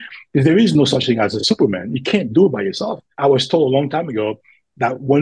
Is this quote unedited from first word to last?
no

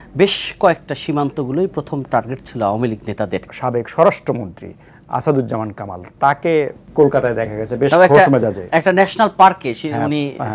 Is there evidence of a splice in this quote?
yes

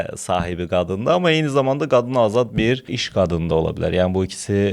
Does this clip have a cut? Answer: no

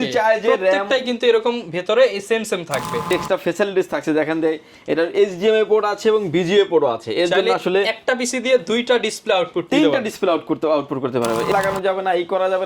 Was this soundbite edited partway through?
yes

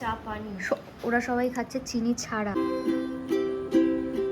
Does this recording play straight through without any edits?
no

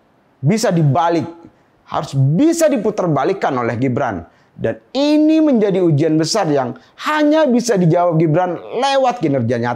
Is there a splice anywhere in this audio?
no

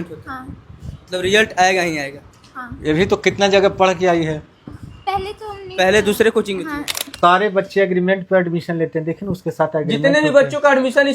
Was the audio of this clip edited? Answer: yes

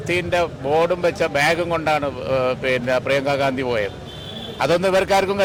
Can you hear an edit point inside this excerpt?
no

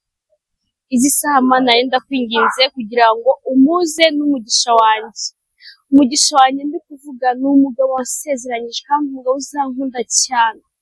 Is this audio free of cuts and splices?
yes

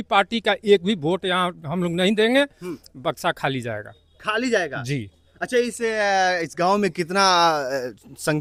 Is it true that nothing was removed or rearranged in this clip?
yes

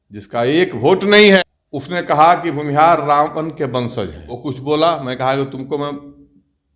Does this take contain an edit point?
yes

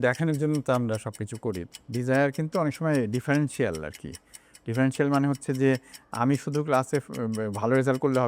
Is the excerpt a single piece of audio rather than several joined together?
no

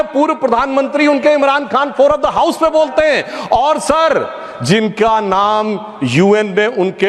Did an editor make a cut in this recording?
no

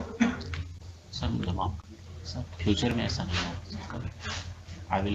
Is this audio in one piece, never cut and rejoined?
yes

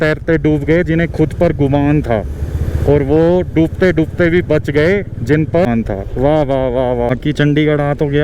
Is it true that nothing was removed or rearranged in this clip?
no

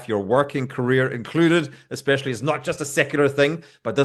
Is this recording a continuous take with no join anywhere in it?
yes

